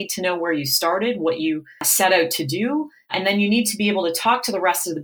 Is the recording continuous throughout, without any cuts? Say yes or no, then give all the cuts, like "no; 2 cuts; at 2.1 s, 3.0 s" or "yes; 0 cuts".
no; 1 cut; at 1.8 s